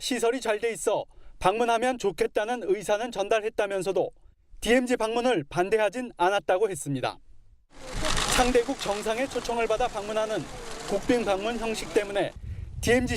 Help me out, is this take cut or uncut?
cut